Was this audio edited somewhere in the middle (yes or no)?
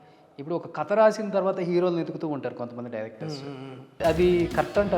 yes